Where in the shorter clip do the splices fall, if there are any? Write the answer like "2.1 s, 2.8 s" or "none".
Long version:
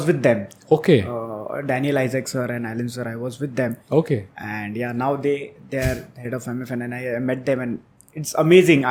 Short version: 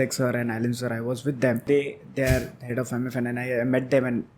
1.6 s